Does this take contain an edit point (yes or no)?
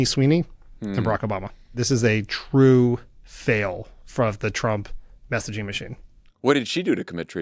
yes